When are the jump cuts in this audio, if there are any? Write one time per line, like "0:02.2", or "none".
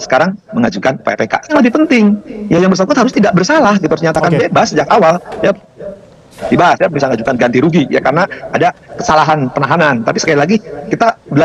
0:01.5
0:06.4